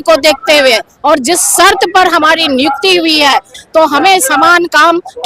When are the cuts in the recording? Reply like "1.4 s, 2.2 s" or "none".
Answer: 3.5 s